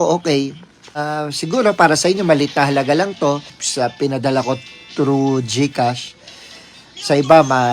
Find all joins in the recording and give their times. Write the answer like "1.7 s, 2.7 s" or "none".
1.1 s, 3.6 s